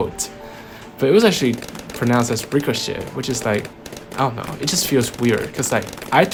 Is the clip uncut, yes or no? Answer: yes